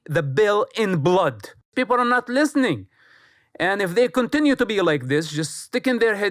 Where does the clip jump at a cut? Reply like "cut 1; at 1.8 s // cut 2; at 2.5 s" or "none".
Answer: cut 1; at 1.7 s